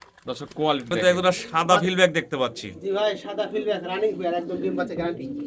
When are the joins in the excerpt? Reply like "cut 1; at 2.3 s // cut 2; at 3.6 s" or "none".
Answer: cut 1; at 0.9 s